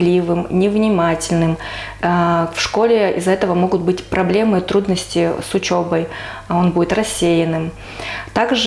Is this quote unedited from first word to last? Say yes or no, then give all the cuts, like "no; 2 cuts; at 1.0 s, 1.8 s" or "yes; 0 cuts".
yes; 0 cuts